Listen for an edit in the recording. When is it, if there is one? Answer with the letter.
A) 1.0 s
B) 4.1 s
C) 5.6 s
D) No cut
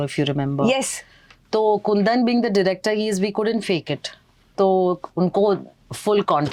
D